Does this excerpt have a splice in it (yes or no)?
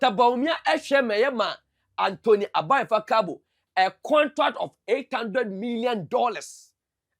no